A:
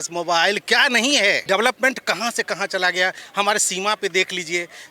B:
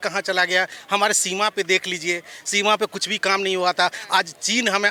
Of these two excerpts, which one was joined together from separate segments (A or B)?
A